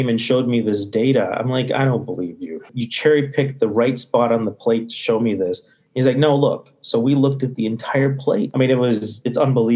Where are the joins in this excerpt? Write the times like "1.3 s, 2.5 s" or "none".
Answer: none